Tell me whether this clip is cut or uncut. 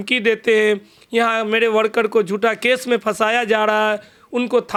uncut